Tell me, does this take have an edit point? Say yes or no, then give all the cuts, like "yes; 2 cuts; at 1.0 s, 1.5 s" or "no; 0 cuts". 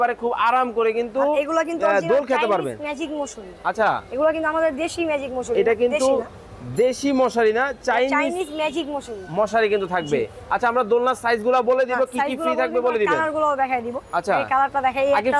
no; 0 cuts